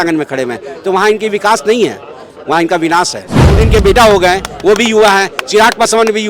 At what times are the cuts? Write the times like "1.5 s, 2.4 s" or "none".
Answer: 3.6 s